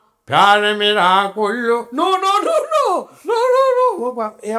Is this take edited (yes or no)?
no